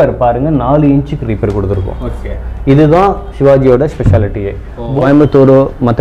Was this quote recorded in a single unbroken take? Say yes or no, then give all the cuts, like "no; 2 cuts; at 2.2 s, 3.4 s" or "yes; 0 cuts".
no; 1 cut; at 5.0 s